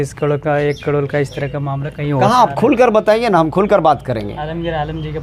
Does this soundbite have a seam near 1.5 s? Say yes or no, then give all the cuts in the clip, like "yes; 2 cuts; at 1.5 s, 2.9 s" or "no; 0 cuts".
no; 0 cuts